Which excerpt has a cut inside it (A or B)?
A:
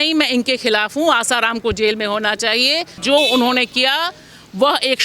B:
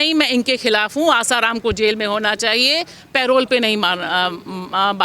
A